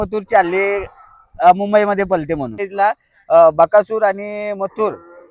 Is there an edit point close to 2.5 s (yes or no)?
yes